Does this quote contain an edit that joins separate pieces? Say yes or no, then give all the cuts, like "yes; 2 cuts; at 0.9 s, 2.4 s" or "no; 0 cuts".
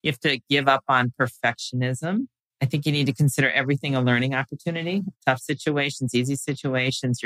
yes; 2 cuts; at 2.4 s, 5.2 s